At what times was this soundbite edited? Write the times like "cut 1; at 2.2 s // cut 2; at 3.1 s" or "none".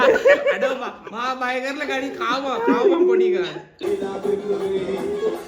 cut 1; at 3.8 s